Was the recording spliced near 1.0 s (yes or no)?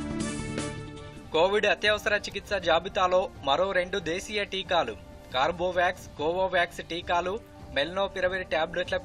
yes